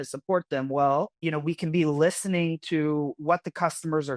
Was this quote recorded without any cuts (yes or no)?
no